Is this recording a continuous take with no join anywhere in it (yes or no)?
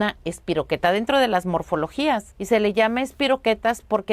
no